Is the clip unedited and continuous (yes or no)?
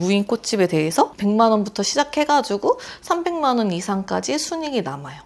no